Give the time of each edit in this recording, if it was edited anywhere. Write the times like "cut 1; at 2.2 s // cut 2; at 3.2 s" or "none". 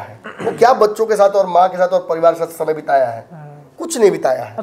none